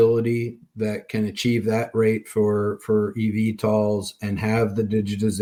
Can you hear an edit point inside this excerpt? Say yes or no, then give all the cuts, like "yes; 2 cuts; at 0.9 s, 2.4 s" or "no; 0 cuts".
no; 0 cuts